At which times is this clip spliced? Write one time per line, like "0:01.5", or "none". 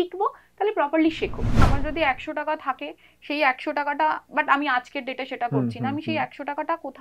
0:01.7